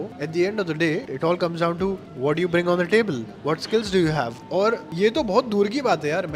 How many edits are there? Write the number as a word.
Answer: one